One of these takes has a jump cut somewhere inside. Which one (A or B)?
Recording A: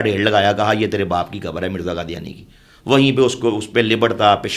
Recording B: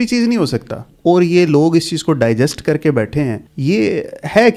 B